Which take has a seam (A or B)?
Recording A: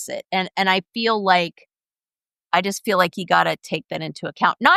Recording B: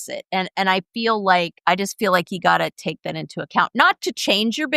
B